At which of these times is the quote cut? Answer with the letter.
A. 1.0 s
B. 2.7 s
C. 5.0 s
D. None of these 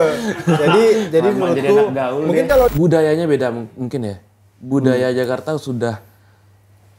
B